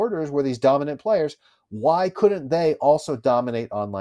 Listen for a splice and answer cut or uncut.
uncut